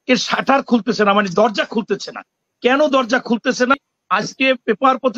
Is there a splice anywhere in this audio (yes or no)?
yes